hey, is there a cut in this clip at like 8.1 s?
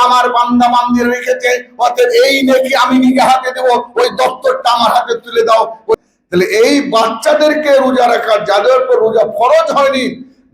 no; 1 cut; at 5.9 s

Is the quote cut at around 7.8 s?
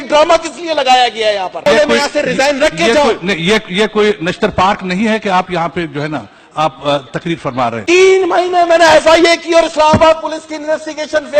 yes; 2 cuts; at 1.6 s, 7.8 s

